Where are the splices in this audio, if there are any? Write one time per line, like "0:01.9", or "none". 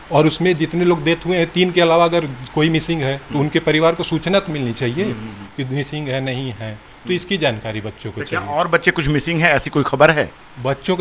none